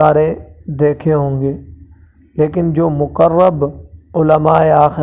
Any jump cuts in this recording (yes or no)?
no